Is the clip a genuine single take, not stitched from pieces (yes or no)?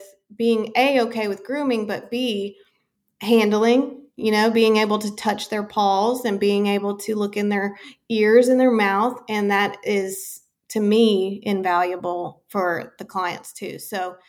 yes